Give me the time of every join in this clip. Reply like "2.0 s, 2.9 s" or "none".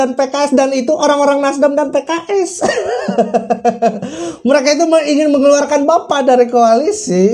none